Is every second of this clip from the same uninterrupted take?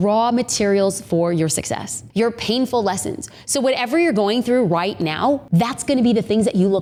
yes; 0 cuts

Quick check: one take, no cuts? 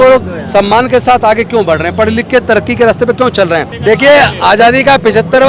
no; 1 cut; at 3.7 s

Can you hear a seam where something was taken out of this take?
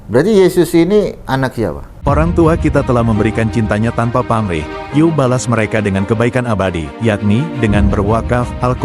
yes; 1 cut; at 1.9 s

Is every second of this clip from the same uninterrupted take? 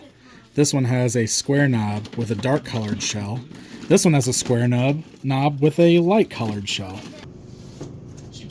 no; 1 cut; at 7.3 s

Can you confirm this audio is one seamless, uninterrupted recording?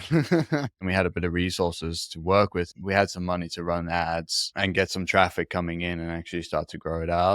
no; 2 cuts; at 0.8 s, 2.8 s

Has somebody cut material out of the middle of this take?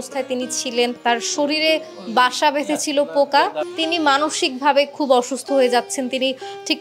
yes; 2 cuts; at 1.0 s, 3.6 s

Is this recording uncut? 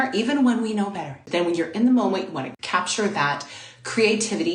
no; 2 cuts; at 1.2 s, 2.5 s

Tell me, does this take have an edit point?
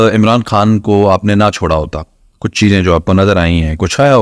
no; 0 cuts

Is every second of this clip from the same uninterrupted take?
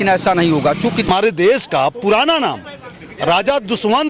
no; 1 cut; at 1.1 s

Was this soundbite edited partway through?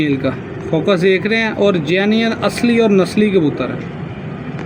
no; 0 cuts

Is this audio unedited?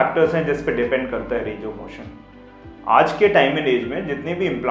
yes; 0 cuts

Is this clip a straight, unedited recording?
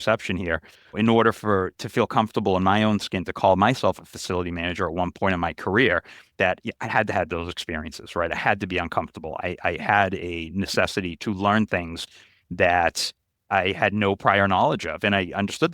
no; 3 cuts; at 0.9 s, 11.1 s, 13.4 s

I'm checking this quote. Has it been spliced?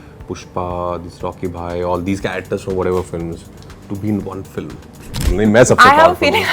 yes; 1 cut; at 5.3 s

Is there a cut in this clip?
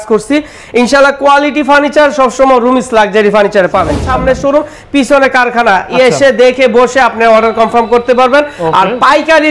yes; 1 cut; at 4.0 s

